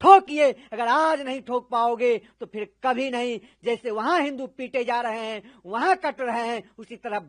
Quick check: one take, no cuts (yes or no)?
yes